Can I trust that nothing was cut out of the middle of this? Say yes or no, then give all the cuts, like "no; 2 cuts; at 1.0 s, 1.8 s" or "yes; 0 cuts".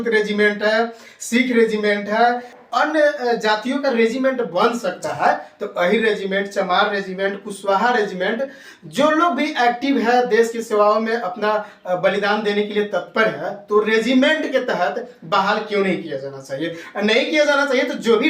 no; 1 cut; at 2.6 s